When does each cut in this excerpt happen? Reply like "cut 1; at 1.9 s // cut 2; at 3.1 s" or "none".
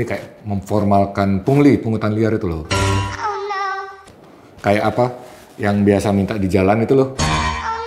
none